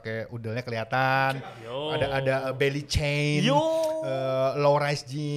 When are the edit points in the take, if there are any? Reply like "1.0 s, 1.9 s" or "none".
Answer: none

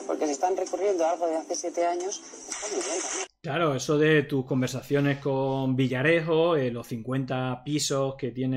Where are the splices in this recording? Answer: none

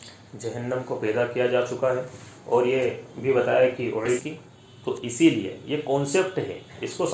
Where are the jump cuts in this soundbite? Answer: 4.2 s

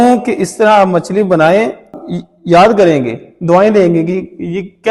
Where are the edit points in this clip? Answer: 1.9 s

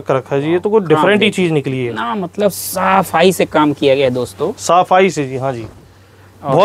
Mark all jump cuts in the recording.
none

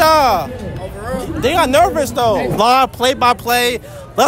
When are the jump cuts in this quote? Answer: 2.5 s

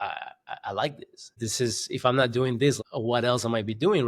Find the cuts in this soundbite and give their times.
1.4 s, 2.8 s

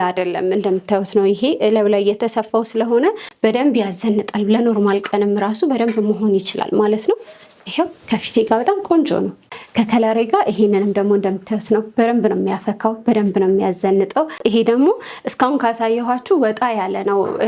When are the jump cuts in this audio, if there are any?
3.3 s, 9.4 s, 14.4 s

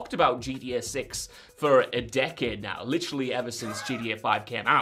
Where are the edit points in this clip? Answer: none

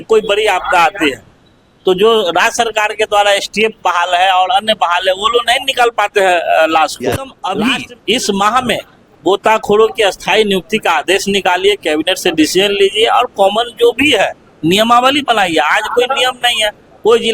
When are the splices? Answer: 7.4 s

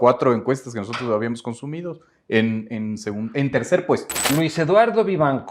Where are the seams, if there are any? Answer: 4.1 s

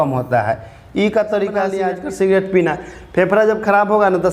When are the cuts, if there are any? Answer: 1.9 s

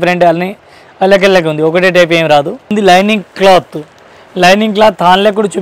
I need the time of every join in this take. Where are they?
2.7 s

